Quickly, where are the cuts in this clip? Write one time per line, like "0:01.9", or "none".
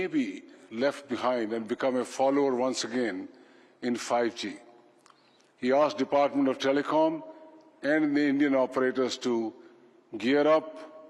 none